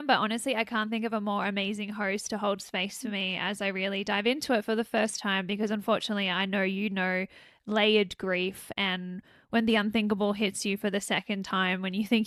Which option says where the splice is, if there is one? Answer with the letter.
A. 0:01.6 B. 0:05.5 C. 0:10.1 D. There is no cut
D